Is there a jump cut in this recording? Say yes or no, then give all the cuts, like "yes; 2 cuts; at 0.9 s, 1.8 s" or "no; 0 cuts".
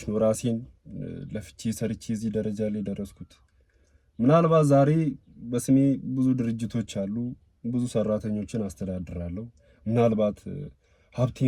no; 0 cuts